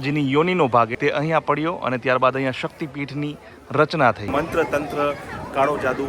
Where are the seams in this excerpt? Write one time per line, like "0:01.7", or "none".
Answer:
0:00.9
0:04.2